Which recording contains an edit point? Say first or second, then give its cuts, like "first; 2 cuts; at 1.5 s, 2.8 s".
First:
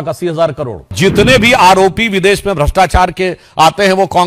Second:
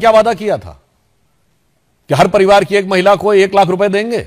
first; 1 cut; at 0.9 s